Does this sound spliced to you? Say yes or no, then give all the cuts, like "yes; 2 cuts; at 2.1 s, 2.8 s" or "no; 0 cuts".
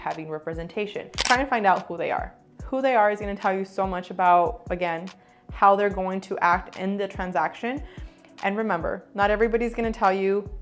yes; 1 cut; at 1.1 s